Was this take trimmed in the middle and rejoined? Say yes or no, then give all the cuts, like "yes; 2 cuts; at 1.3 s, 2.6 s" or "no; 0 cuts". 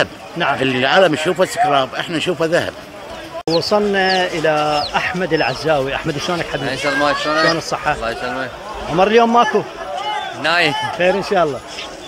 yes; 1 cut; at 3.3 s